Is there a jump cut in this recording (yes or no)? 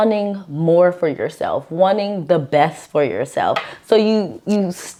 no